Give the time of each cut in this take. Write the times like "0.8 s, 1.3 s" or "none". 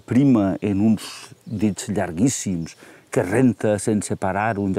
none